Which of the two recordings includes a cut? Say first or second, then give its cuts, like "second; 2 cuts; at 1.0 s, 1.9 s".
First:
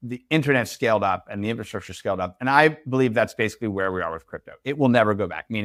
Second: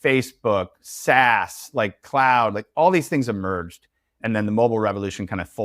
second; 1 cut; at 4.2 s